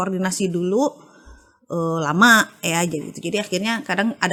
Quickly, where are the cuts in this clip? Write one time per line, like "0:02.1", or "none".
none